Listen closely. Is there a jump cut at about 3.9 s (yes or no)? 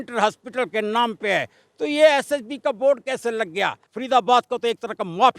yes